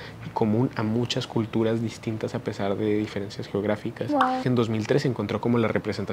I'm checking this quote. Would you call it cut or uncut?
cut